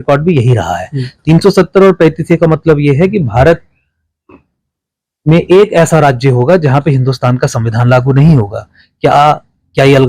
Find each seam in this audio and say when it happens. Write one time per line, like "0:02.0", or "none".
none